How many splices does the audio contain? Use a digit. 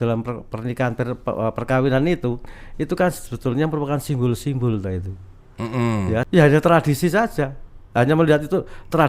1